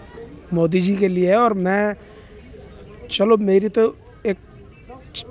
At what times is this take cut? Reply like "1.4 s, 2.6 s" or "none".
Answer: none